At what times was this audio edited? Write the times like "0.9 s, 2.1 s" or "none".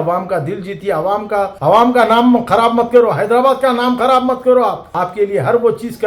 none